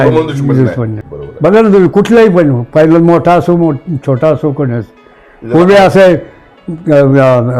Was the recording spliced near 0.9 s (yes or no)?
yes